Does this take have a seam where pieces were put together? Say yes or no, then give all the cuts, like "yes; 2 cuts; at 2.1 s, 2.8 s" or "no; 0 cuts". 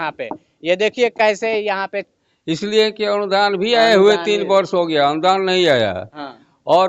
yes; 1 cut; at 2.0 s